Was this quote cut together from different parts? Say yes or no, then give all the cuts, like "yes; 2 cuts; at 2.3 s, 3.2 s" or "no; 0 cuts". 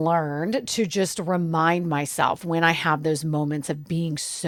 no; 0 cuts